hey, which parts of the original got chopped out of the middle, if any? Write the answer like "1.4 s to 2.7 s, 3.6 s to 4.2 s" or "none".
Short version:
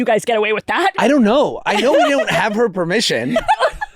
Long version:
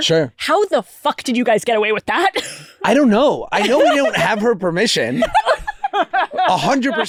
2.3 s to 2.8 s